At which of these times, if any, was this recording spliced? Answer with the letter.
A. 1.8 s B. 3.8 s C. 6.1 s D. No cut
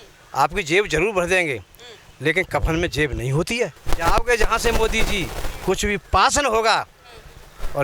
B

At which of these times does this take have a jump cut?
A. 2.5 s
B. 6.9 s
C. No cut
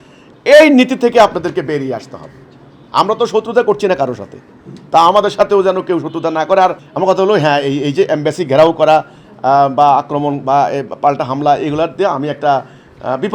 B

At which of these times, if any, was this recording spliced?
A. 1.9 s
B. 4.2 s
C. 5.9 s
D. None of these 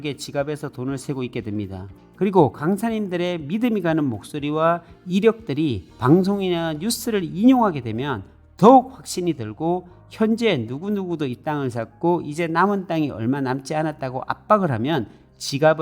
A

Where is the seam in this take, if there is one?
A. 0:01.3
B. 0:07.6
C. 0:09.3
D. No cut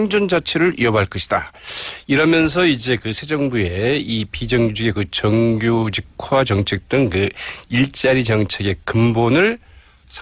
D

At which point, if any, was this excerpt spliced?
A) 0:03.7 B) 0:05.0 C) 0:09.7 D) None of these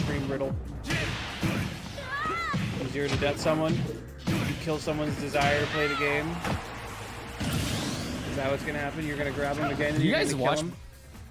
D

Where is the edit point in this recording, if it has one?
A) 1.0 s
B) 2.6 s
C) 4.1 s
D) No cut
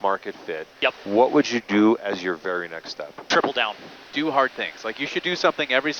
C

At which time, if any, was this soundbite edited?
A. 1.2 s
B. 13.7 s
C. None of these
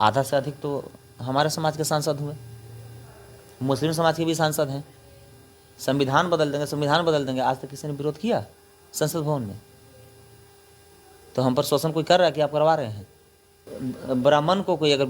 B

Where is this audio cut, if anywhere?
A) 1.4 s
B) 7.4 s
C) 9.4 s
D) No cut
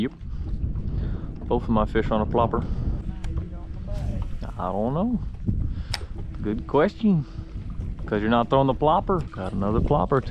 C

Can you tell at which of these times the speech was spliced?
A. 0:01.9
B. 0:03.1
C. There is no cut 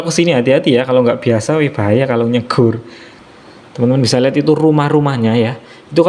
B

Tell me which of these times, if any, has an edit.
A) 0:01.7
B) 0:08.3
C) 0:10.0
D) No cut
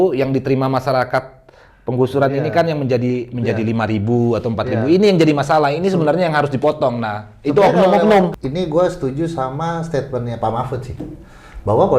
B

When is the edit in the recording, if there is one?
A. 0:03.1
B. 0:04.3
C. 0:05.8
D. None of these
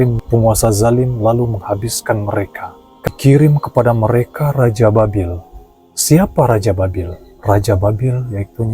A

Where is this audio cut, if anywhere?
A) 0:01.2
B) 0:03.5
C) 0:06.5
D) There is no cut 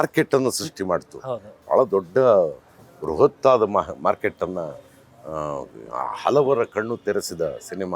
D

